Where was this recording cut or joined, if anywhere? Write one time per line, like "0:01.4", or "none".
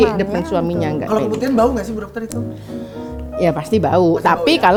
none